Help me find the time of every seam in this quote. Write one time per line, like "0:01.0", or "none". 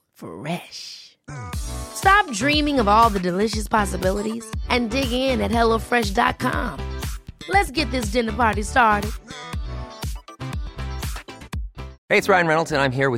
0:12.0